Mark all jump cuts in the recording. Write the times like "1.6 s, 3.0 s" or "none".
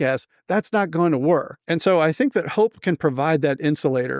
1.5 s